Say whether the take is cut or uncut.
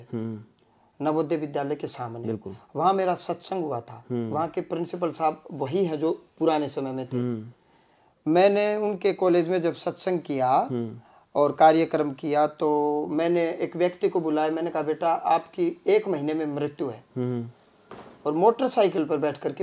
uncut